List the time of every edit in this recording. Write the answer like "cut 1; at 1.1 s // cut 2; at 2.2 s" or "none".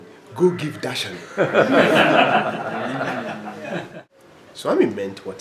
cut 1; at 4.0 s